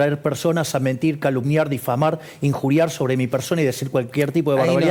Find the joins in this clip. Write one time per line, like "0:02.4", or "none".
none